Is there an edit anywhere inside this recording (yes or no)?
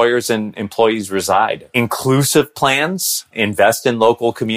no